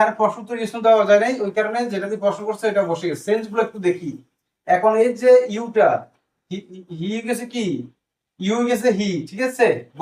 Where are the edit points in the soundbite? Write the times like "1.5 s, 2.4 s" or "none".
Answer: none